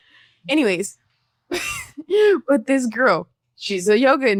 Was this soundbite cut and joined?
no; 0 cuts

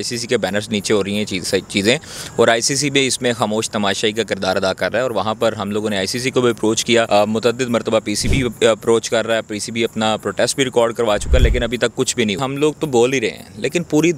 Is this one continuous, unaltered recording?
no; 2 cuts; at 7.1 s, 12.4 s

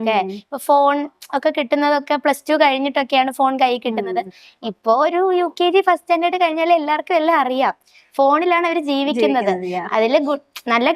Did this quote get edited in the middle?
no; 0 cuts

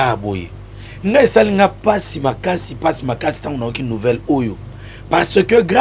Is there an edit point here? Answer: no; 0 cuts

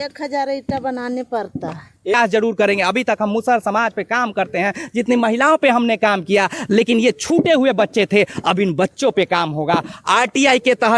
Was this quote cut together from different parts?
yes; 1 cut; at 2.1 s

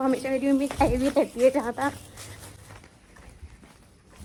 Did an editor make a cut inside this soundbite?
no; 0 cuts

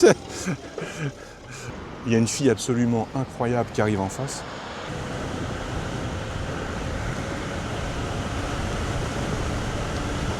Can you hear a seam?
yes; 2 cuts; at 1.7 s, 4.9 s

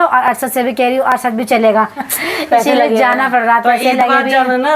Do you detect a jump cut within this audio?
yes; 1 cut; at 2.0 s

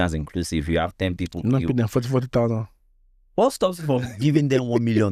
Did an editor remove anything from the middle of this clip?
no; 0 cuts

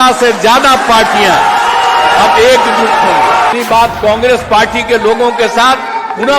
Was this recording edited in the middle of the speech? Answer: yes; 1 cut; at 3.5 s

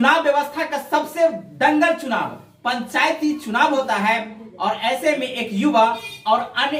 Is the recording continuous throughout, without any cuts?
yes; 0 cuts

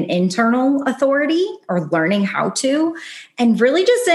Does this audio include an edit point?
no; 0 cuts

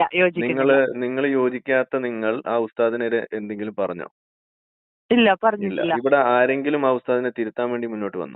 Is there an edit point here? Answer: yes; 1 cut; at 6.1 s

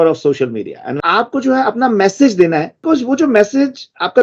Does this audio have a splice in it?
yes; 2 cuts; at 1.0 s, 2.7 s

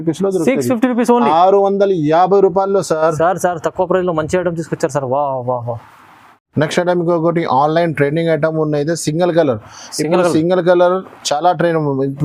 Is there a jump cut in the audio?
no; 0 cuts

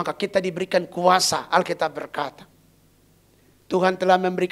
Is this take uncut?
yes; 0 cuts

